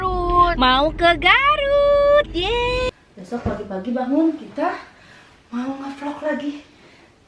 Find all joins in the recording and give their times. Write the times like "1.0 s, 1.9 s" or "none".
2.8 s